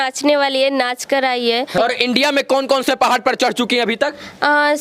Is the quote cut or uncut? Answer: cut